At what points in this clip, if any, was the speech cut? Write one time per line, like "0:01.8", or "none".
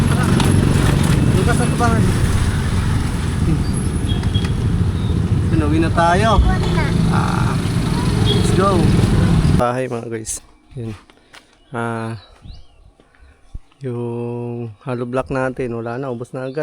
0:09.6